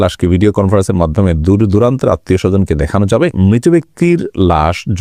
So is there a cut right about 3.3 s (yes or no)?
no